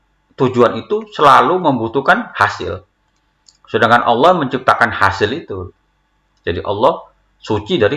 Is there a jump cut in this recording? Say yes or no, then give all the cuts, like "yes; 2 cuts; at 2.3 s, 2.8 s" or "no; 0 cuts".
no; 0 cuts